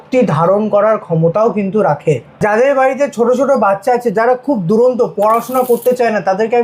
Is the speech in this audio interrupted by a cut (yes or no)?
no